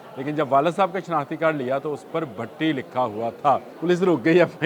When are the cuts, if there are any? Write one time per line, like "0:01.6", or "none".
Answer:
0:03.7